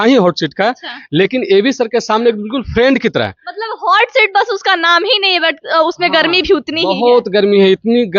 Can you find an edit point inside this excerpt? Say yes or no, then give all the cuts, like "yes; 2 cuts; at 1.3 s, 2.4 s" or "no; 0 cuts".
no; 0 cuts